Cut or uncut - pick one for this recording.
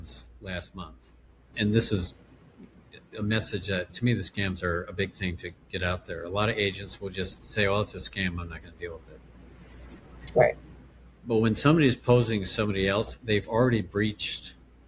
cut